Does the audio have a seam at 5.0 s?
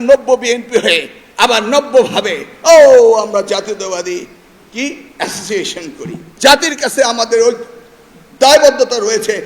no; 1 cut; at 6.2 s

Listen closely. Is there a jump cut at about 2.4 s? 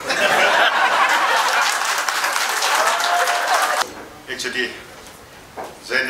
no; 1 cut; at 3.8 s

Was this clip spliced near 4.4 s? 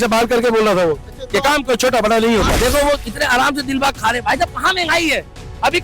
no; 1 cut; at 2.5 s

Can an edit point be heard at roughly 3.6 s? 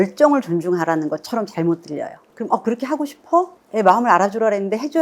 yes; 2 cuts; at 2.2 s, 3.6 s

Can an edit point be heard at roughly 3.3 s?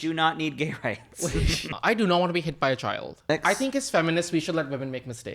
yes; 2 cuts; at 1.7 s, 3.3 s

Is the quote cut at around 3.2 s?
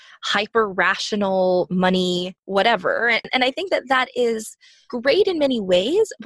yes; 2 cuts; at 2.4 s, 3.2 s

